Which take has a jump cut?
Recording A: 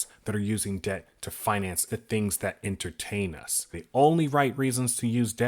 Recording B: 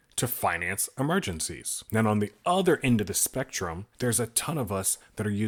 A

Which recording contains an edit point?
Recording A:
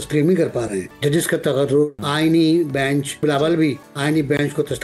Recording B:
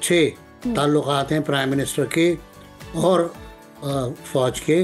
A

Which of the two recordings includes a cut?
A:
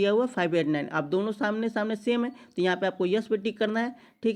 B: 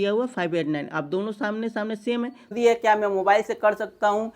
B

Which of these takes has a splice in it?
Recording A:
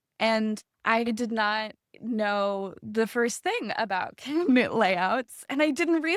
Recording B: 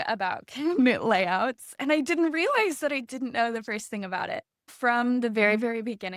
B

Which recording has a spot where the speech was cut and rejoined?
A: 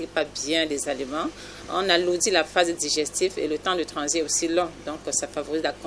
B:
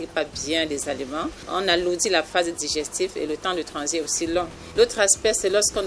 B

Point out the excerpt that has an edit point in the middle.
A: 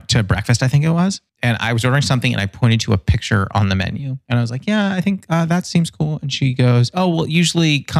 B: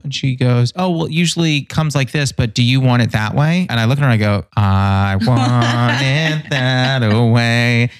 B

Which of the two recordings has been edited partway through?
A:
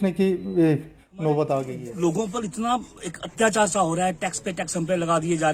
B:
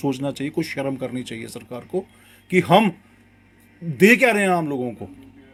A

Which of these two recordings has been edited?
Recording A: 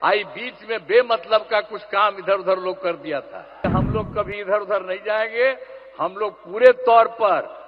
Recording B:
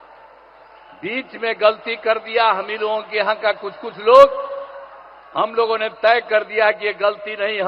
A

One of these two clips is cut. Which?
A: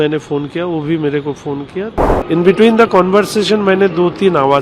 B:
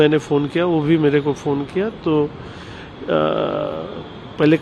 A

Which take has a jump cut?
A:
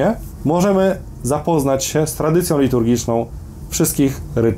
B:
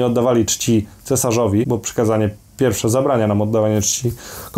B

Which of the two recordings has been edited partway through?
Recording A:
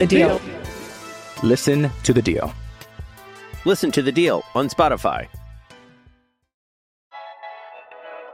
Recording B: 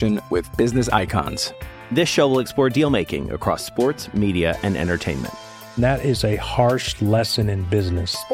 A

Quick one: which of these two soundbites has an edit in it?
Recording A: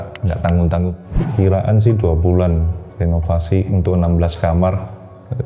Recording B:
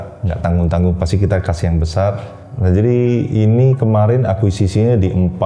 A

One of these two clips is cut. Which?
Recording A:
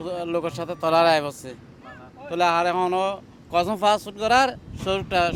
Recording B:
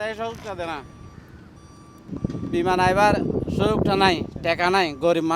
B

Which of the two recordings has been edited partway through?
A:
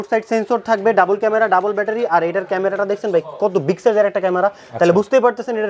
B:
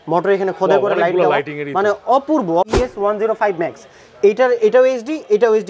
B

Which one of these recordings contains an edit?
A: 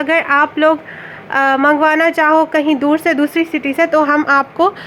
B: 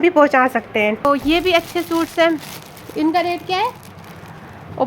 B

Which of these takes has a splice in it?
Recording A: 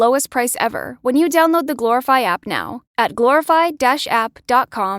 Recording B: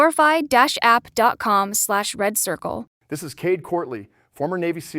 B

